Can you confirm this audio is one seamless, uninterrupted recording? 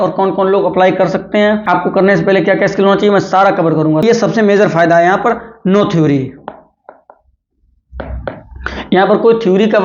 no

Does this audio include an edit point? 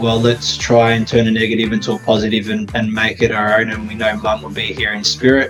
no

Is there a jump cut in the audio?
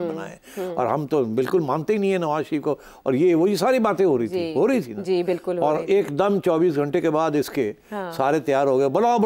no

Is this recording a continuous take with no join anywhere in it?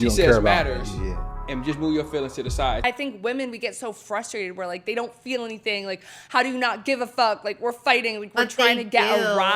no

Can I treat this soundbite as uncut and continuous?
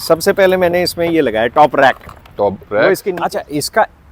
no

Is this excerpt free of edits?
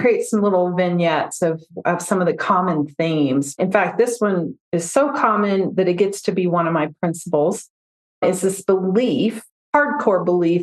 no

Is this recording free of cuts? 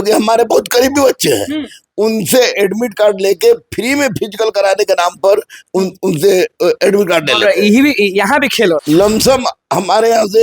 no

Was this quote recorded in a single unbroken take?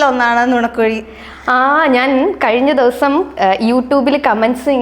yes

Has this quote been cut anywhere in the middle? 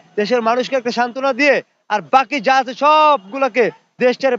no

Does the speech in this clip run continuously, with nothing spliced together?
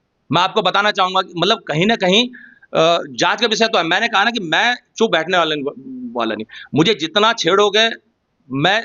yes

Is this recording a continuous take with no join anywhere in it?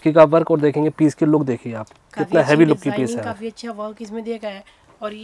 yes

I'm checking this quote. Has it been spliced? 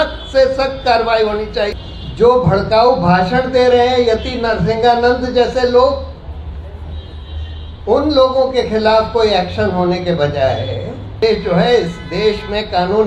yes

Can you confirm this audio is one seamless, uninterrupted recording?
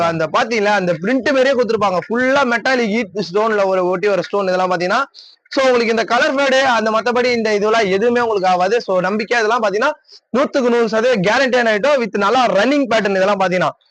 yes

